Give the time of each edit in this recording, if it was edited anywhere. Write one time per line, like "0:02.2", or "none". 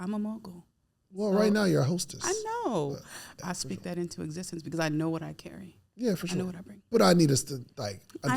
0:03.4